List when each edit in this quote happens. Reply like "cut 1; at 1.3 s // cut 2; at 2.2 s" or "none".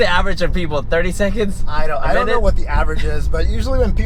none